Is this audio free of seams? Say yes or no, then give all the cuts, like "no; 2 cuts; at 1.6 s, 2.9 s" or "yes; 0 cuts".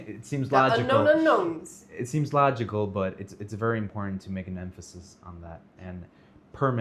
yes; 0 cuts